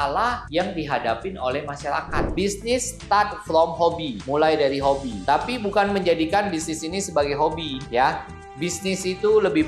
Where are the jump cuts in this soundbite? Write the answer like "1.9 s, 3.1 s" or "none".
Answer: 2.2 s